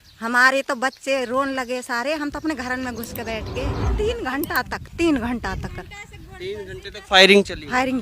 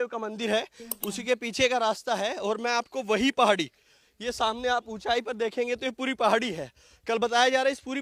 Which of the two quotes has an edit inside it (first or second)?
first